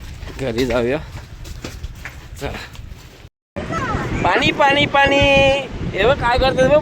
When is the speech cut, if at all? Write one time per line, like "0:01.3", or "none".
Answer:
0:03.4